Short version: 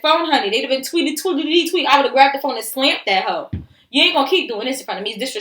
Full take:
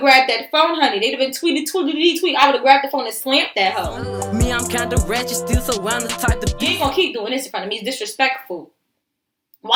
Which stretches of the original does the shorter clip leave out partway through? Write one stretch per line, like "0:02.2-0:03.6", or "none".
0:04.2-0:06.4